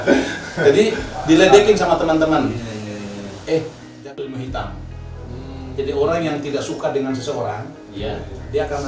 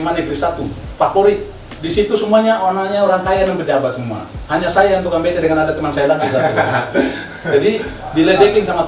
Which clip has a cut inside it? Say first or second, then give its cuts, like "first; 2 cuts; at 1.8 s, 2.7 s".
first; 1 cut; at 3.8 s